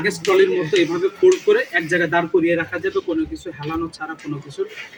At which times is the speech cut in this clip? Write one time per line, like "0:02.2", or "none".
none

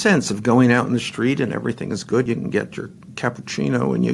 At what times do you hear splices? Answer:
0:02.3

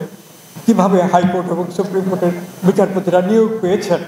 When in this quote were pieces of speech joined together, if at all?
none

